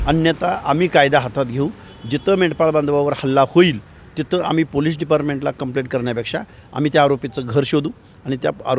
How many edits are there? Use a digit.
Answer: 0